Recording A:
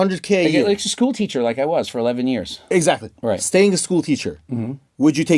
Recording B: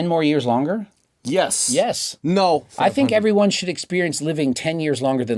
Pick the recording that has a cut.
B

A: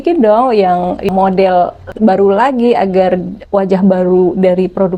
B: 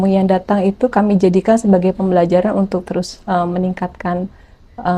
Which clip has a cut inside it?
A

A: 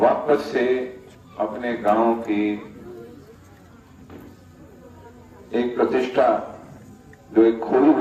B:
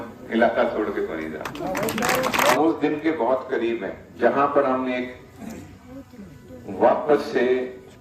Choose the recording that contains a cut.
B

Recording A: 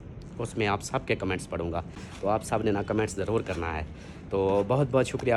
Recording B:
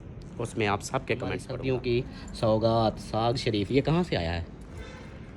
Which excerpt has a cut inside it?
B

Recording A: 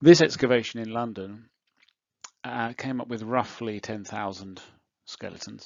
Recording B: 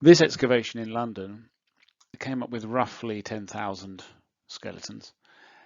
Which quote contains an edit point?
B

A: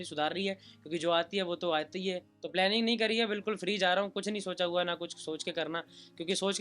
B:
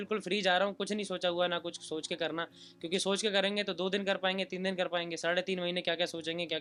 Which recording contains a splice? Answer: A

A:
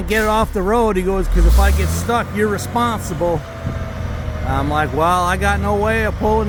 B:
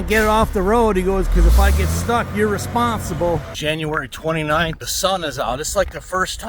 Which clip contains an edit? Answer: B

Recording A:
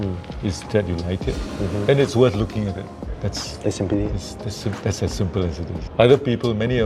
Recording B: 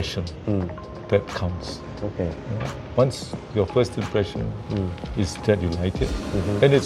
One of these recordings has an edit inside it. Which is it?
A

